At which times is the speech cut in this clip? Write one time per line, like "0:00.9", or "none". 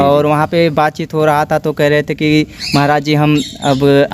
none